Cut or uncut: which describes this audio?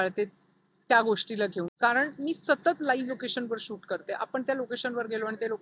uncut